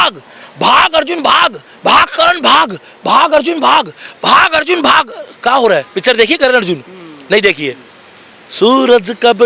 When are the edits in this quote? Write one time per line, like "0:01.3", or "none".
none